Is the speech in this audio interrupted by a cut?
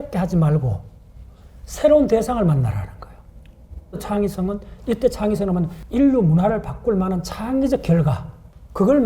yes; 2 cuts; at 4.0 s, 5.8 s

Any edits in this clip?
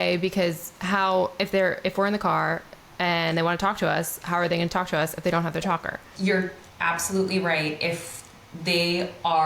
yes; 1 cut; at 6.1 s

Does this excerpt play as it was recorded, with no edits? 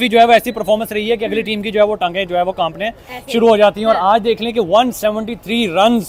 yes; 0 cuts

